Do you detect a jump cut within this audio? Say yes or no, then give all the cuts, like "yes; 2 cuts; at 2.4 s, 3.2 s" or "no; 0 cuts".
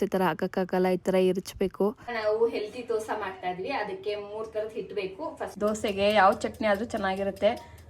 yes; 2 cuts; at 2.2 s, 5.5 s